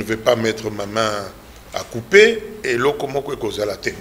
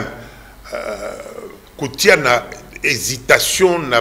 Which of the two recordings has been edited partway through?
first; 1 cut; at 2.5 s

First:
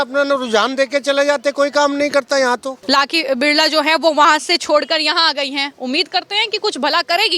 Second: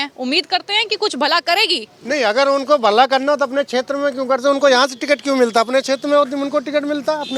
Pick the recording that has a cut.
first; 1 cut; at 2.7 s

